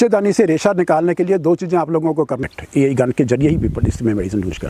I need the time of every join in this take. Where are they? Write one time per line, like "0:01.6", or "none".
0:02.4